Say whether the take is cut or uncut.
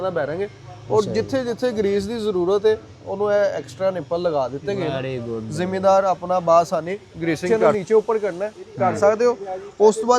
cut